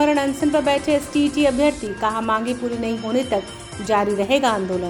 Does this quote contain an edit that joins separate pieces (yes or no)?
no